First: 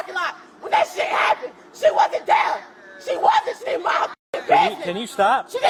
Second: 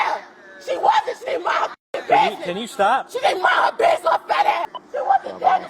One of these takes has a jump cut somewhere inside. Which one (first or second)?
second